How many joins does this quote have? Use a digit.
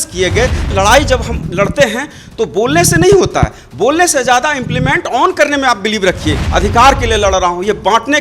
2